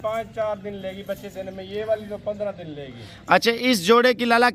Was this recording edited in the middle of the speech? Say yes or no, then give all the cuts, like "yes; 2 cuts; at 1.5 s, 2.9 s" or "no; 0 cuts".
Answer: no; 0 cuts